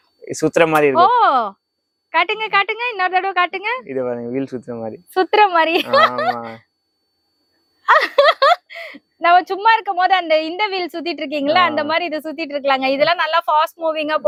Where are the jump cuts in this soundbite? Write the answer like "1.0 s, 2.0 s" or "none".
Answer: none